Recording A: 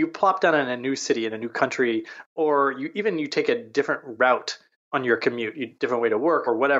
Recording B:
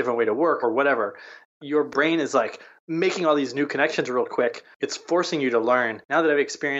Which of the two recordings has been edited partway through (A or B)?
B